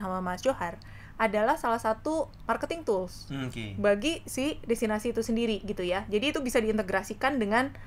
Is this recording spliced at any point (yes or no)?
no